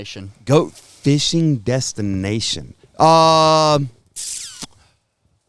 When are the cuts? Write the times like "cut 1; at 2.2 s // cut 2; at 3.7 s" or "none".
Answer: none